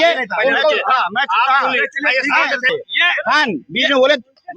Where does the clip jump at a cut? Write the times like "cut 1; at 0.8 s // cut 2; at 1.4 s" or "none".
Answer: cut 1; at 2.7 s

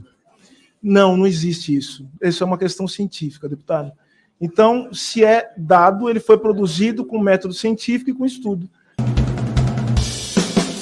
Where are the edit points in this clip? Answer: cut 1; at 8.8 s

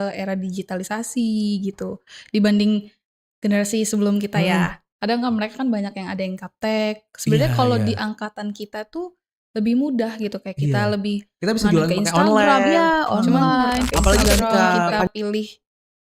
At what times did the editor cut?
cut 1; at 15.0 s

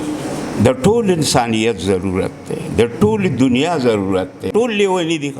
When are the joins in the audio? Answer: cut 1; at 4.5 s

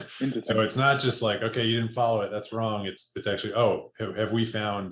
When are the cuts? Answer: none

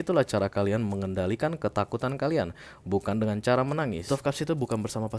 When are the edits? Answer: cut 1; at 4.1 s

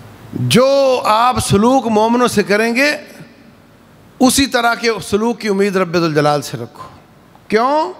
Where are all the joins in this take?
none

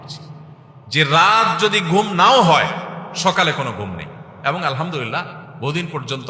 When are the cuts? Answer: none

